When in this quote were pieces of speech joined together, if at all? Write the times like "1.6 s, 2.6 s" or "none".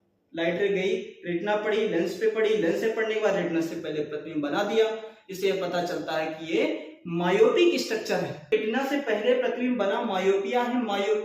8.5 s